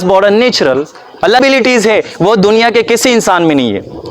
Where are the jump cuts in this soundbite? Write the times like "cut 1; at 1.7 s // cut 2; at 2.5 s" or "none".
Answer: cut 1; at 1.4 s